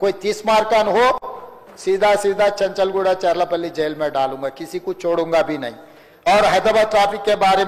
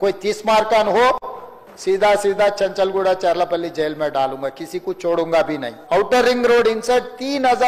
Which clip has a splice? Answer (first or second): second